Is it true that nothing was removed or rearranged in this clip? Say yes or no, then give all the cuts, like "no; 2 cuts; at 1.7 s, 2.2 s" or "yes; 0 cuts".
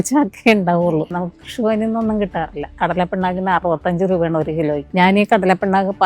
no; 3 cuts; at 0.9 s, 2.7 s, 4.9 s